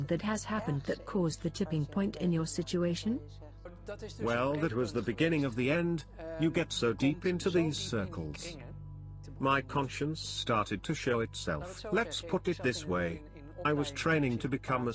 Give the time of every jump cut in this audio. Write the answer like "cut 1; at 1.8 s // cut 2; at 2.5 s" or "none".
none